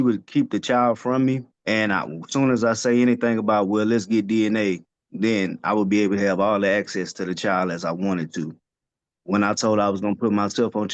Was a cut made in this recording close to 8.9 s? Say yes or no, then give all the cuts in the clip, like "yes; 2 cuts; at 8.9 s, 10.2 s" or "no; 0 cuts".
no; 1 cut; at 1.5 s